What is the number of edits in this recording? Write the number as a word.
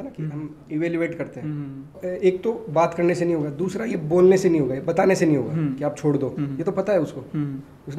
one